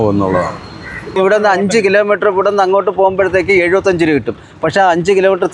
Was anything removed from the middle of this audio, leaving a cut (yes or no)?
yes